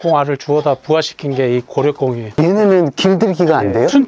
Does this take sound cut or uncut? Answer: uncut